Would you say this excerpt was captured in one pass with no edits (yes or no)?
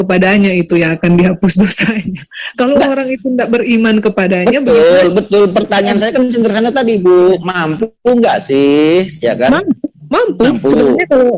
yes